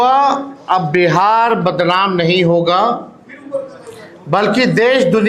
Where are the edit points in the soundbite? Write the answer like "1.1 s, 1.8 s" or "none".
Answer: none